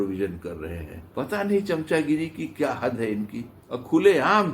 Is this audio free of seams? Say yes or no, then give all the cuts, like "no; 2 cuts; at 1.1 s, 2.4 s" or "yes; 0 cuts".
no; 2 cuts; at 1.0 s, 3.6 s